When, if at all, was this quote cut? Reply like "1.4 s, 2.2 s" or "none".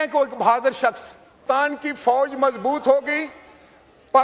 none